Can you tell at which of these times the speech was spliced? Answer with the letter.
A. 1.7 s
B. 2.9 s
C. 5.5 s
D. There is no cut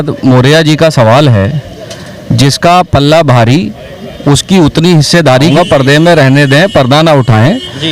C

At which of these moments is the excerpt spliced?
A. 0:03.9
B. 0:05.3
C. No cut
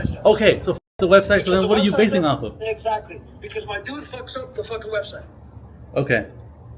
C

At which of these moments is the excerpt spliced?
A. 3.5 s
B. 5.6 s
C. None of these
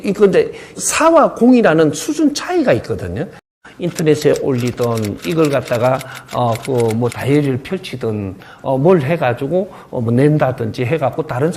A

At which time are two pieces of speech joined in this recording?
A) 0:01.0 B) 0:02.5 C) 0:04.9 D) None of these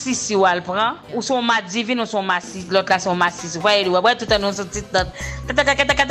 A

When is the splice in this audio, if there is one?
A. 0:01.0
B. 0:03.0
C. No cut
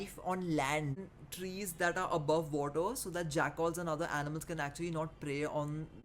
A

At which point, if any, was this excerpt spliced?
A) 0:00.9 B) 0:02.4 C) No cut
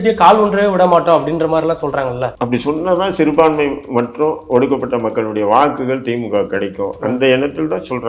B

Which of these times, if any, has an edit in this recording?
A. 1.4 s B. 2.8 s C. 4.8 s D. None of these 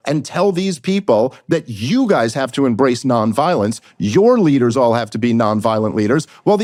D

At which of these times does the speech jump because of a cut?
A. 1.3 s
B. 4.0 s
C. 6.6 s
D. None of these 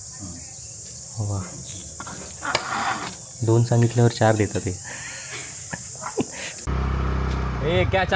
C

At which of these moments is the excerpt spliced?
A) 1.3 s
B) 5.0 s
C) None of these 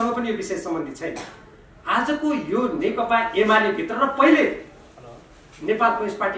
C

